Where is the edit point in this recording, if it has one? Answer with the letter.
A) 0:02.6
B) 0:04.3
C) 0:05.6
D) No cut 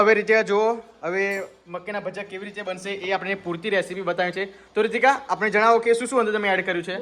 D